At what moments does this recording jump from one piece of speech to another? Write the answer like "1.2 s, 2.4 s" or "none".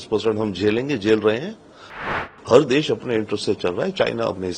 2.1 s